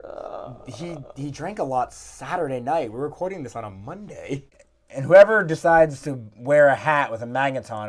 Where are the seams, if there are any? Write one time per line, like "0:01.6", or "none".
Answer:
0:04.5